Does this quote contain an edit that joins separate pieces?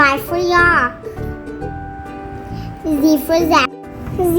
yes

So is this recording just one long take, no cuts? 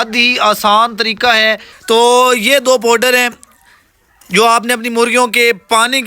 no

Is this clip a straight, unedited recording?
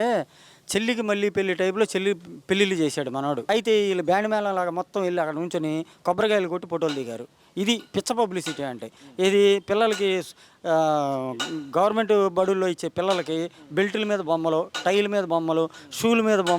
no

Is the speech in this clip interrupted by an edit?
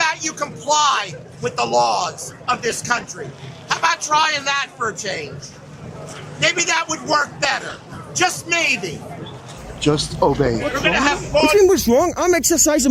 yes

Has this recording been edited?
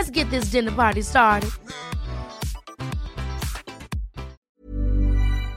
yes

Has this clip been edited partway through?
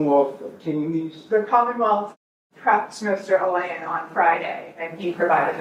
no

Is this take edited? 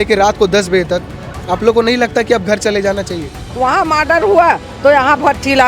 yes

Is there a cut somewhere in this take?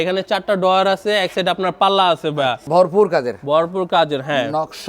yes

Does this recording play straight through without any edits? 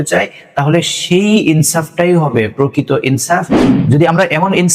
no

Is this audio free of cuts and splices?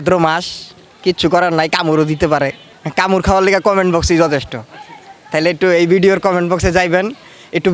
yes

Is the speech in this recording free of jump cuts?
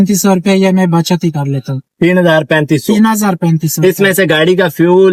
yes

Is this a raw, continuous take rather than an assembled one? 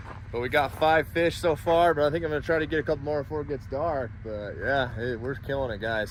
yes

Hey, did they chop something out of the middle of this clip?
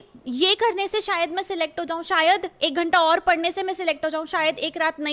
no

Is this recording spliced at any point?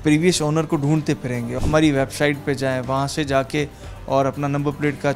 yes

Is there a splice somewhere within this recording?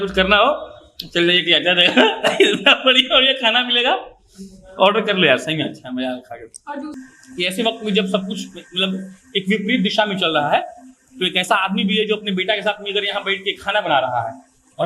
yes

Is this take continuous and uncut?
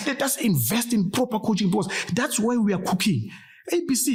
yes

